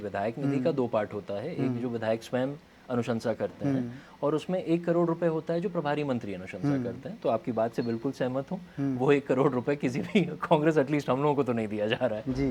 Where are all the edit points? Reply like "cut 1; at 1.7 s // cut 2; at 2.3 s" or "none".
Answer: none